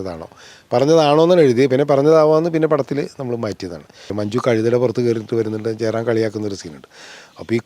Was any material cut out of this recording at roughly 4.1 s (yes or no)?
yes